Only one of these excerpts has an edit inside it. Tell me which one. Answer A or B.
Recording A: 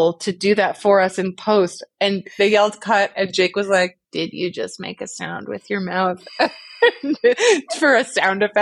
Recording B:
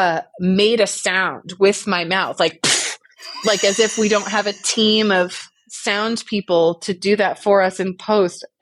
A